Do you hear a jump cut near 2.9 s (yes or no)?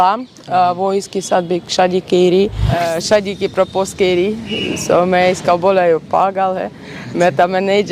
yes